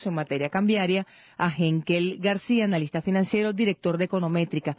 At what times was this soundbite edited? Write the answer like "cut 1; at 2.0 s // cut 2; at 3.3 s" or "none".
cut 1; at 3.0 s